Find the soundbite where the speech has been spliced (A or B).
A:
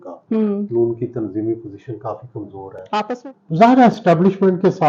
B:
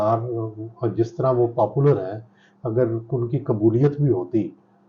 A